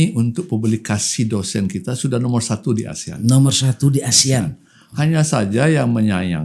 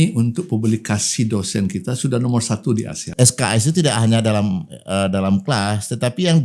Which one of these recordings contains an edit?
second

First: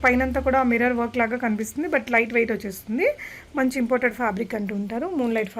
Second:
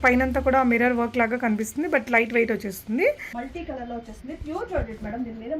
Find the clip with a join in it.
second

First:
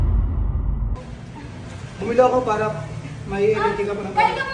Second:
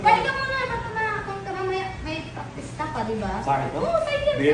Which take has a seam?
first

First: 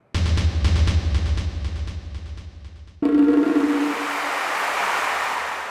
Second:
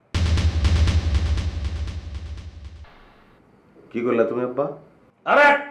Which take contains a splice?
second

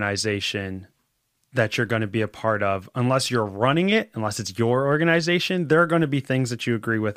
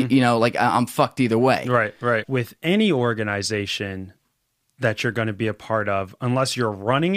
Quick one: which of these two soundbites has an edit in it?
second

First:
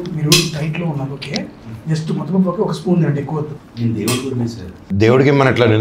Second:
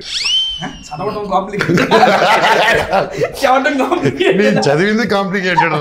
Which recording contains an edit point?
first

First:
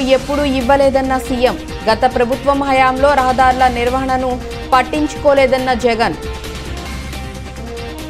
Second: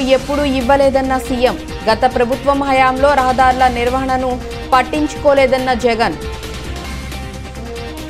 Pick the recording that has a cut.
first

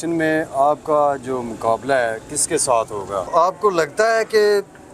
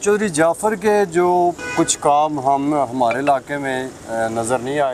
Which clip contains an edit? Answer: first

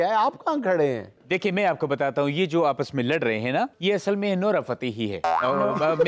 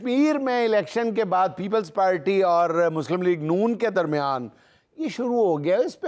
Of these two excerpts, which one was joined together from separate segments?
first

